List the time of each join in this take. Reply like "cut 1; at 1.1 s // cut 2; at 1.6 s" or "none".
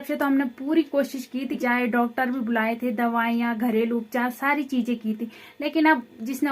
cut 1; at 1.6 s